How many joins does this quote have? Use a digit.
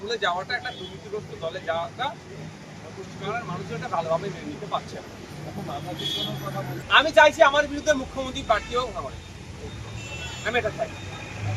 0